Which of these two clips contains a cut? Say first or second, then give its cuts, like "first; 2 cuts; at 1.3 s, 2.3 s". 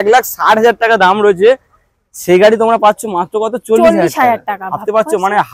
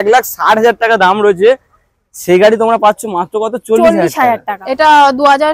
second; 1 cut; at 4.6 s